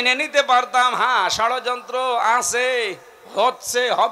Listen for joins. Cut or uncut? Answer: uncut